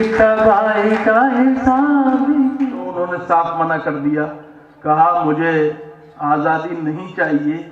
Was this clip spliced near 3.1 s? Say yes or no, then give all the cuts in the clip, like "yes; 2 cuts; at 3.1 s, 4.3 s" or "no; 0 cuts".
yes; 1 cut; at 3.1 s